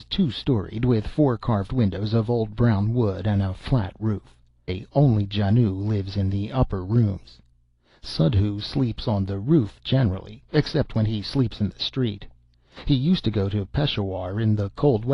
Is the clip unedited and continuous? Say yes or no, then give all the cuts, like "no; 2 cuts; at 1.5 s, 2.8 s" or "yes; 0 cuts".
yes; 0 cuts